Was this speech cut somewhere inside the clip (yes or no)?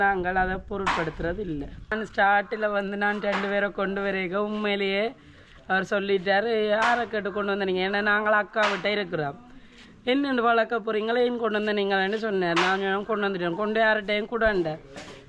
no